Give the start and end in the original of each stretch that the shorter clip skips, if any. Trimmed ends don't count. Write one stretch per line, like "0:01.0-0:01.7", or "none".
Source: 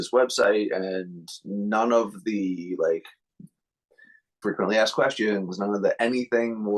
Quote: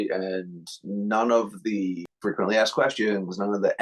0:02.7-0:04.2